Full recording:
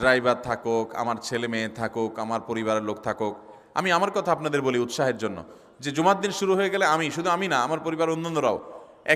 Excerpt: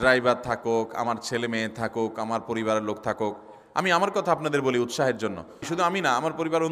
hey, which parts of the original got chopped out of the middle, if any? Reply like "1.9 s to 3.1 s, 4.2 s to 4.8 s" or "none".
5.7 s to 7.1 s